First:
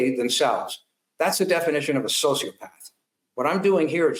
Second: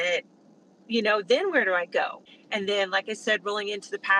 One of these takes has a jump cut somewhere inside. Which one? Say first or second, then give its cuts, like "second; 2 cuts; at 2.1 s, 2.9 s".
second; 1 cut; at 2.2 s